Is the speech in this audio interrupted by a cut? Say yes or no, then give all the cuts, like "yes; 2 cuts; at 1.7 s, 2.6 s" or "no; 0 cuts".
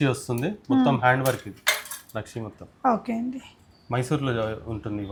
no; 0 cuts